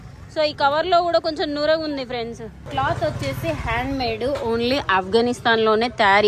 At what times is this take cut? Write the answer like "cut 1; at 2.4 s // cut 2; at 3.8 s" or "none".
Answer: cut 1; at 2.6 s